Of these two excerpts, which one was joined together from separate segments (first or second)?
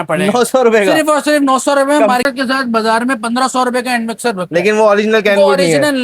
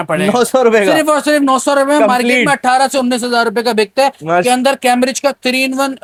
first